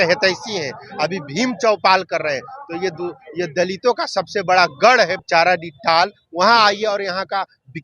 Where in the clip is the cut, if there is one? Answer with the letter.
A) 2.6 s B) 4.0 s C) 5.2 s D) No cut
C